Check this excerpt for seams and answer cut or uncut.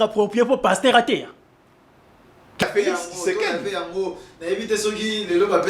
cut